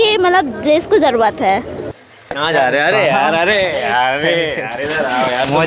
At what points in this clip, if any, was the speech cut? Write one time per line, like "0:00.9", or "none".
0:01.8